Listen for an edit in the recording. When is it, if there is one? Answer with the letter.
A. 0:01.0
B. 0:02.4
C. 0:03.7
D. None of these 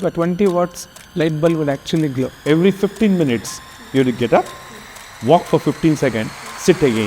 B